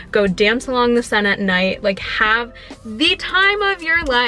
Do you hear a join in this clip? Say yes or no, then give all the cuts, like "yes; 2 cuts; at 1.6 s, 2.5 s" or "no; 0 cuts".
no; 0 cuts